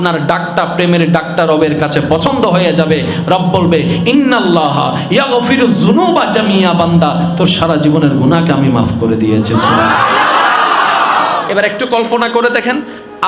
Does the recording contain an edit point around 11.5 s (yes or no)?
no